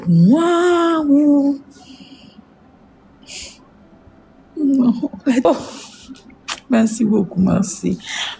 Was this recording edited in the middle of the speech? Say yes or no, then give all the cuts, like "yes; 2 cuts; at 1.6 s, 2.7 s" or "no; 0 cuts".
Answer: yes; 1 cut; at 5.5 s